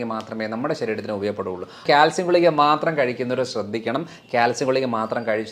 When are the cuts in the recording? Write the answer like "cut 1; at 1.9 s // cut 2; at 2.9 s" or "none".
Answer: cut 1; at 1.8 s